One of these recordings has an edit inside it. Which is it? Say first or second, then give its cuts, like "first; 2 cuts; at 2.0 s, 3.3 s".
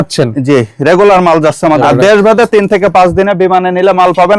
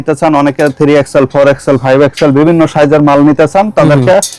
first; 1 cut; at 1.8 s